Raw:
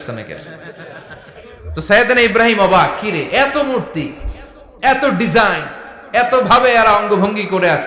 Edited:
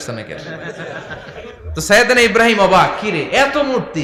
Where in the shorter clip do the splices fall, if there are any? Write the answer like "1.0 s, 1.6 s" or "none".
none